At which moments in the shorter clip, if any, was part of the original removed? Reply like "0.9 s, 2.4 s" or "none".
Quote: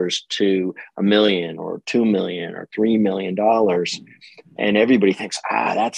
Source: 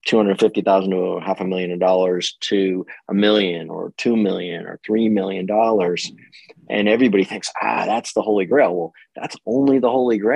none